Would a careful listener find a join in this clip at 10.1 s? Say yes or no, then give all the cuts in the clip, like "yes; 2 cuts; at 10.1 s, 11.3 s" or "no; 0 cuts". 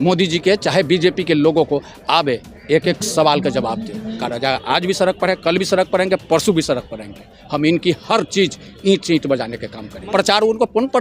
yes; 2 cuts; at 4.2 s, 10.1 s